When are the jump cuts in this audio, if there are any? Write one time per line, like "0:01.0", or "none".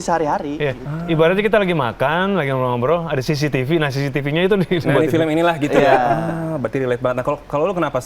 none